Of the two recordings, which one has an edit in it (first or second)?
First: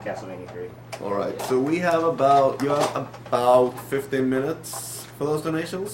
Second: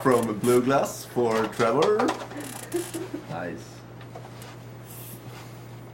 first